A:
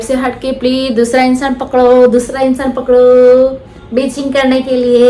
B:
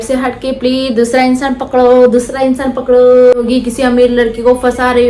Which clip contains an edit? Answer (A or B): B